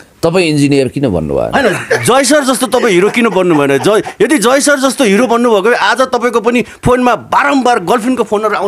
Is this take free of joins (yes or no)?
yes